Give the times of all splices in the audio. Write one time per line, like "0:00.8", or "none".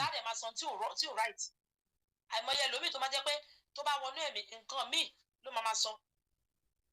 none